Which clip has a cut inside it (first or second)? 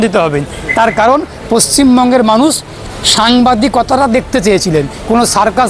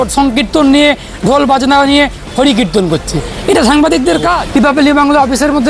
second